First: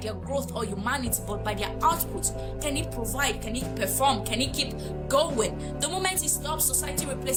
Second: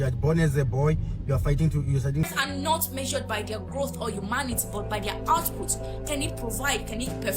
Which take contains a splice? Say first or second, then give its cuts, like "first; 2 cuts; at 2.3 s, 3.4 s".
second; 1 cut; at 2.3 s